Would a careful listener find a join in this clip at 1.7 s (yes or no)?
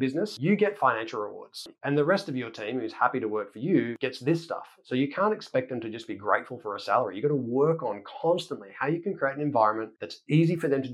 yes